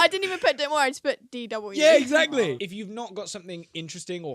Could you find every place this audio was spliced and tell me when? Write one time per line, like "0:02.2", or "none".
0:02.3